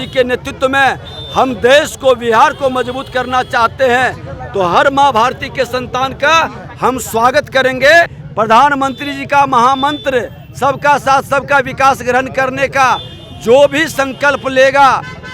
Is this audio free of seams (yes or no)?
no